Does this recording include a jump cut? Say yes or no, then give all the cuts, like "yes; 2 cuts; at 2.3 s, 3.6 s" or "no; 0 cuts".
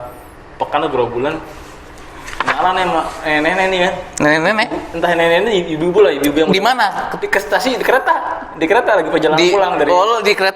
no; 0 cuts